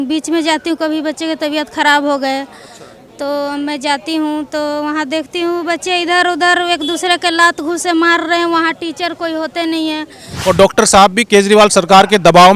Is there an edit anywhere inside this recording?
yes; 1 cut; at 10.3 s

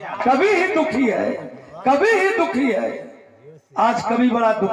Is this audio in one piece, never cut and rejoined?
yes; 0 cuts

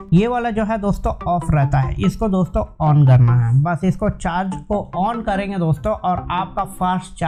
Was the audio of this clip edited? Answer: no; 0 cuts

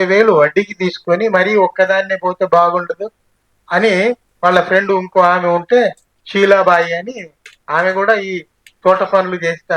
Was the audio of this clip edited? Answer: no; 0 cuts

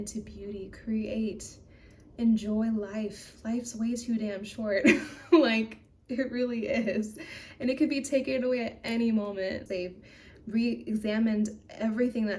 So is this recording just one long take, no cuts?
no; 1 cut; at 9.6 s

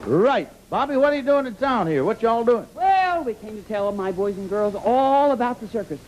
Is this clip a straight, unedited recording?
no; 1 cut; at 5.0 s

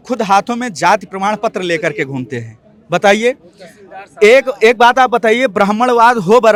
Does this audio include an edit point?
no; 0 cuts

